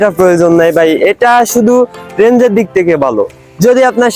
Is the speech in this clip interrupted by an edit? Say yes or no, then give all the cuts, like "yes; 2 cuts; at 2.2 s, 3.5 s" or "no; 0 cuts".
no; 0 cuts